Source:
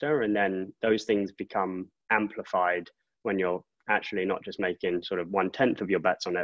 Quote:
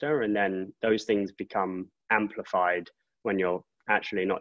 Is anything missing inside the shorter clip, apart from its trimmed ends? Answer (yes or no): no